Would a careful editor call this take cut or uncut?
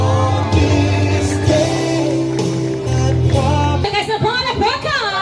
cut